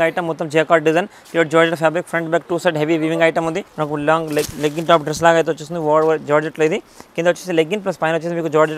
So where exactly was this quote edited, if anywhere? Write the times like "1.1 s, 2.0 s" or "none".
3.7 s